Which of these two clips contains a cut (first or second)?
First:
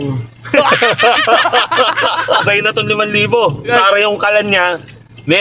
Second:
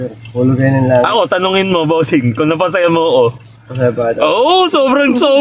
first